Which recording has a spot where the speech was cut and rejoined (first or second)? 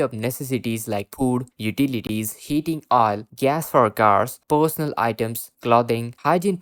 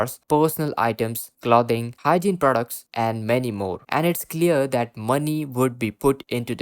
second